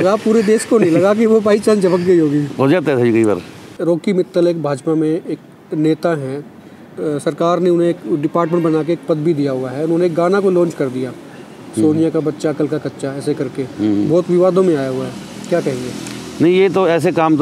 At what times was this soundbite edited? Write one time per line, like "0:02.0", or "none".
0:03.7

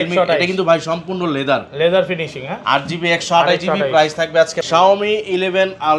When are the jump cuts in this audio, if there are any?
0:04.6

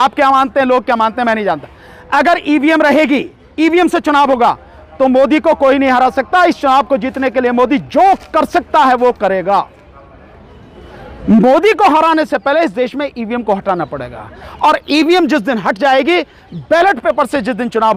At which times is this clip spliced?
none

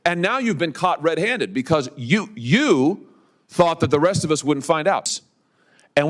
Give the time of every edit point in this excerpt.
0:05.2

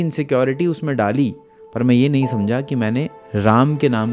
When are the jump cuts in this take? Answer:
none

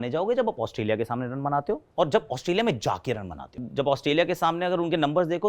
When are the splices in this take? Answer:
0:03.6

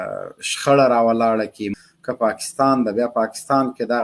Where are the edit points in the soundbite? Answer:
0:01.6

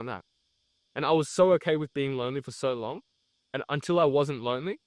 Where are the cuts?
none

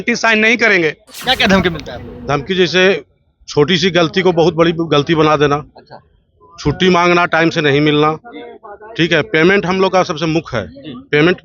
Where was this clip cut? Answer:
0:01.1

